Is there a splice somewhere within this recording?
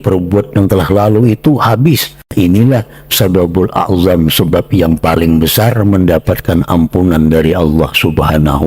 yes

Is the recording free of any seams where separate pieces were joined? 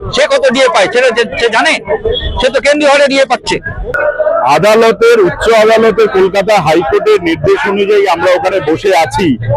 no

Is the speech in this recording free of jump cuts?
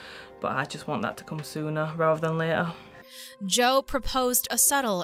yes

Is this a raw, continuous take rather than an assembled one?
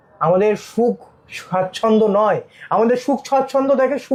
yes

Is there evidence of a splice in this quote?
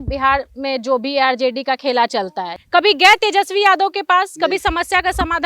yes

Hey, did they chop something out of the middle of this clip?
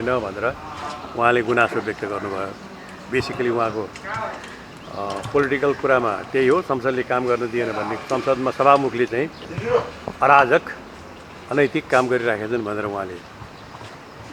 no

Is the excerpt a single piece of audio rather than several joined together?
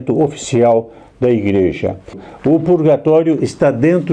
no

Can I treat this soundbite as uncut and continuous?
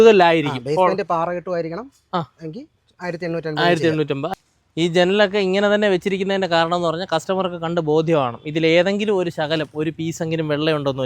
no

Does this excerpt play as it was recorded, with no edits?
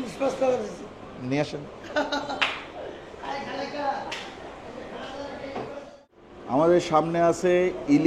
yes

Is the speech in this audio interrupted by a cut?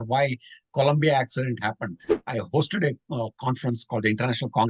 yes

